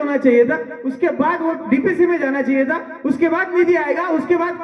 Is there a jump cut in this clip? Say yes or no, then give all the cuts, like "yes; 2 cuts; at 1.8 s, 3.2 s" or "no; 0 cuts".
no; 0 cuts